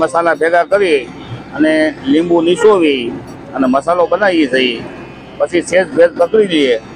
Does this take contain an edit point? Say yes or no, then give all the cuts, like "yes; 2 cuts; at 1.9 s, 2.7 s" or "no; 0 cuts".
no; 0 cuts